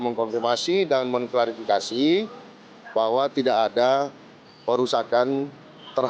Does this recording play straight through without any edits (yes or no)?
yes